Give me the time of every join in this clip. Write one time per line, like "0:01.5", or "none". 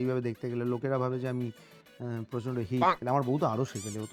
none